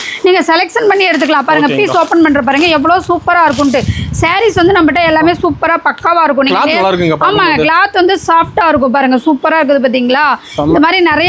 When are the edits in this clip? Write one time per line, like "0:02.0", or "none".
none